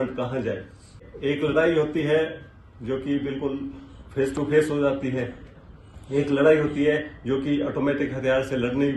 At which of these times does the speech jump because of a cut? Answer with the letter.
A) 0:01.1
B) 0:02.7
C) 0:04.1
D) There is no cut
A